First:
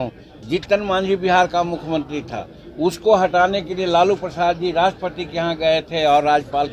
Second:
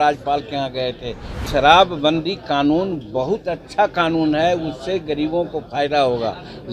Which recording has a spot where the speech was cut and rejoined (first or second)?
second